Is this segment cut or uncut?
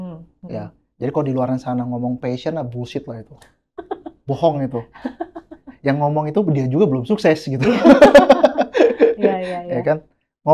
uncut